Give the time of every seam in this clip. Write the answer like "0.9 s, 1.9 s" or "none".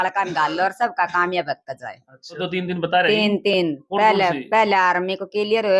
2.4 s